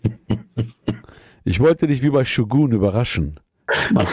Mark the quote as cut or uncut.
uncut